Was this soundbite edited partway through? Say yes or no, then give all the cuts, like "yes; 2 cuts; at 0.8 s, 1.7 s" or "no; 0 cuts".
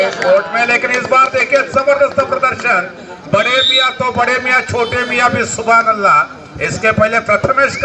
no; 0 cuts